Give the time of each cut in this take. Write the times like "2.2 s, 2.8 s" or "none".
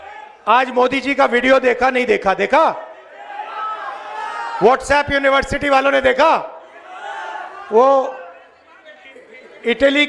none